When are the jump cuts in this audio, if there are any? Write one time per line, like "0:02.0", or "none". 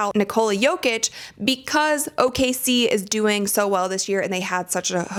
none